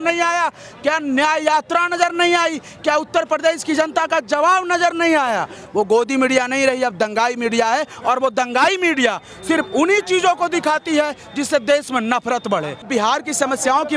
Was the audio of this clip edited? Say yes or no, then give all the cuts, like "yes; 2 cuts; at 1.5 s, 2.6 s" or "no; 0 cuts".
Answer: yes; 2 cuts; at 5.6 s, 12.8 s